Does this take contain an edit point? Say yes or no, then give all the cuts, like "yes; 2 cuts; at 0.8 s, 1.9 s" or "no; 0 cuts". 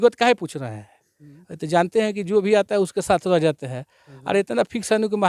no; 0 cuts